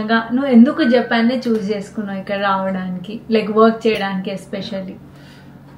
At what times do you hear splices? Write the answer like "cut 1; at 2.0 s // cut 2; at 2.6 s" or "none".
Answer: none